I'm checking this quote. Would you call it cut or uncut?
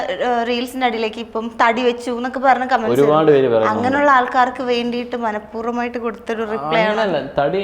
uncut